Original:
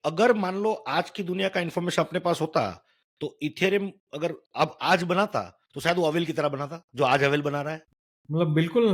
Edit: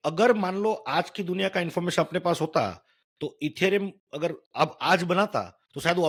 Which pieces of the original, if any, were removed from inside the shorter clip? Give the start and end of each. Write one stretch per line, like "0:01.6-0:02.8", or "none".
none

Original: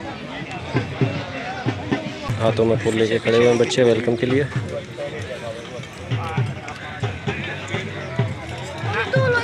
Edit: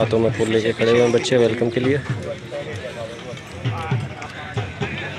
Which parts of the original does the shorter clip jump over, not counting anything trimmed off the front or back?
none

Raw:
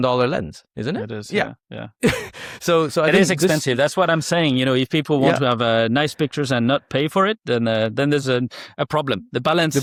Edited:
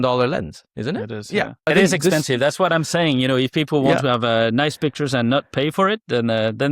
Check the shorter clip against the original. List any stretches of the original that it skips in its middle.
0:01.7-0:03.0

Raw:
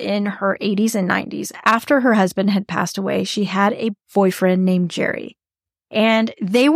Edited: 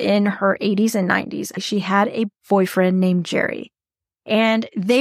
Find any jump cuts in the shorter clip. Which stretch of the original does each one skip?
0:01.6-0:03.2

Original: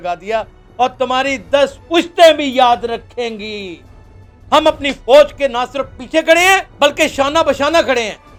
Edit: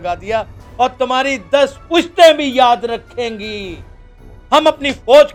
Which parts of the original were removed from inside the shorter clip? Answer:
none

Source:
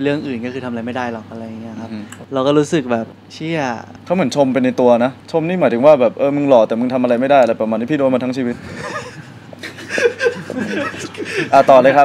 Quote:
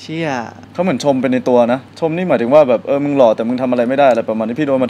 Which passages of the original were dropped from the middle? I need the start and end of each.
none

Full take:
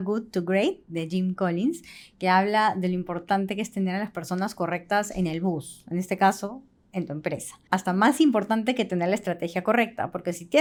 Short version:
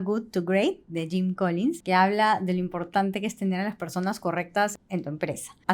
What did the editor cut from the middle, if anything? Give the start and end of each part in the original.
0:01.8-0:02.2
0:05.1-0:06.8

